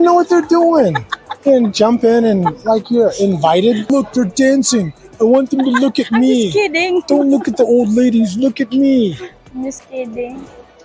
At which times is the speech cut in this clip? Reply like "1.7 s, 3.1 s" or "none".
3.9 s

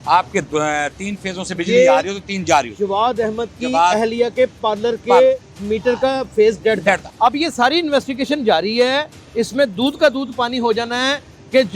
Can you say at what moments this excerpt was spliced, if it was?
7.1 s

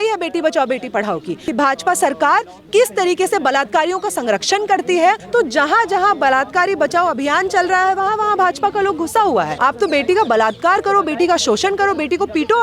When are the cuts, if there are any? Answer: 1.4 s, 5.2 s, 9.5 s

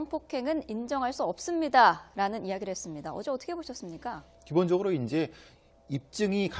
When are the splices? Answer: none

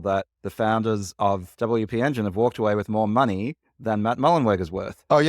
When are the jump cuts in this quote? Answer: 1.5 s

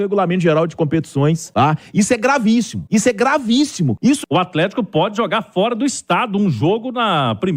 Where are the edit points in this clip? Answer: 1.4 s, 2.8 s, 4.1 s

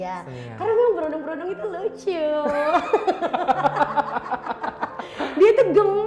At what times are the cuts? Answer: none

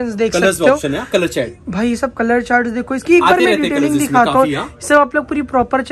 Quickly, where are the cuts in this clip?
none

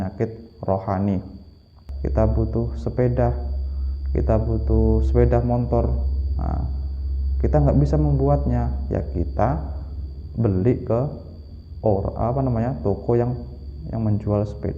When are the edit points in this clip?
1.9 s

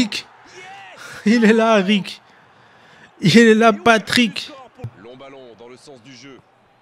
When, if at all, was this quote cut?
4.8 s

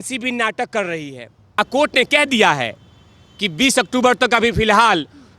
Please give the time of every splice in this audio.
1.4 s

